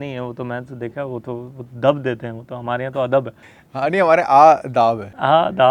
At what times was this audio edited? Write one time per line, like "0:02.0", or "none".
none

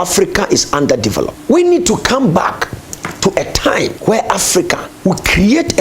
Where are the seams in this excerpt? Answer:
0:01.3

